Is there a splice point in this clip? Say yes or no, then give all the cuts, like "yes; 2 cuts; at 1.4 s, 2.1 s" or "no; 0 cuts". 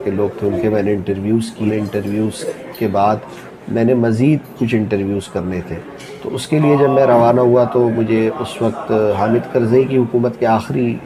no; 0 cuts